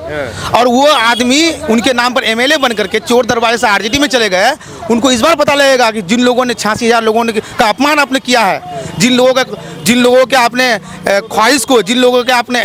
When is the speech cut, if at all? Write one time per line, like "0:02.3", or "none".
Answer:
none